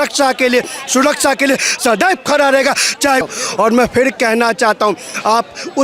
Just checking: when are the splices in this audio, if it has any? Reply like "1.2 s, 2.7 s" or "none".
3.2 s